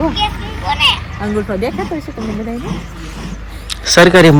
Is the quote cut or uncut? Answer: uncut